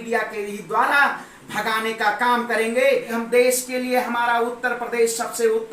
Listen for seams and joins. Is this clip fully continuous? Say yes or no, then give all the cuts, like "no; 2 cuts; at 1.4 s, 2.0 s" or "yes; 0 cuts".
no; 1 cut; at 3.1 s